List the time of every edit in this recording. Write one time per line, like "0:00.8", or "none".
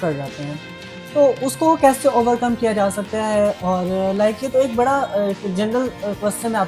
none